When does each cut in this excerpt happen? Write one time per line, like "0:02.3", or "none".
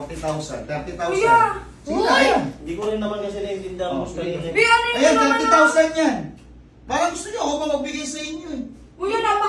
none